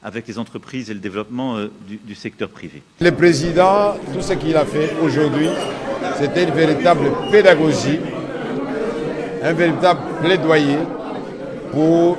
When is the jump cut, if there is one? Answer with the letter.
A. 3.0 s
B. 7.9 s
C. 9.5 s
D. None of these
A